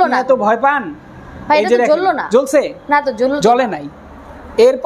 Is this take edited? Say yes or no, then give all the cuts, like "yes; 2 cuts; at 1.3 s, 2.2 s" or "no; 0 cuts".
no; 0 cuts